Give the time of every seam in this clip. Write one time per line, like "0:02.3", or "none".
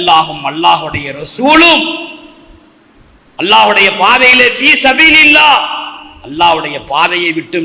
none